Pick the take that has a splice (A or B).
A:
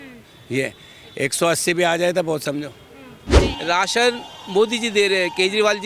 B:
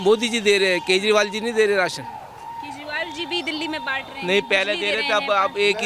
A